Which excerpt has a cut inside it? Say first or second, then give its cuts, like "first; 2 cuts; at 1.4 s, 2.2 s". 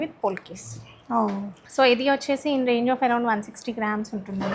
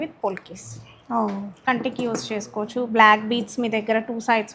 second; 1 cut; at 1.7 s